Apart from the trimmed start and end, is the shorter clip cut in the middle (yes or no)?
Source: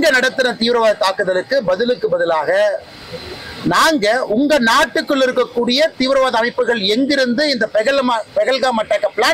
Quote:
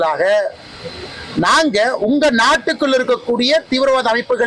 no